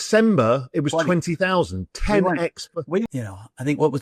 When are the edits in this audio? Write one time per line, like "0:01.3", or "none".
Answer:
0:03.1